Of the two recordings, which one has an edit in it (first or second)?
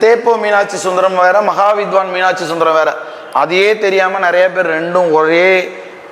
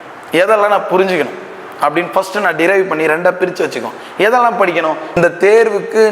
second